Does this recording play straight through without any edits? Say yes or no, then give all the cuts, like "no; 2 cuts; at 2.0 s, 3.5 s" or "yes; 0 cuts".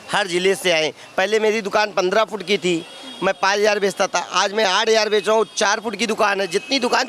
yes; 0 cuts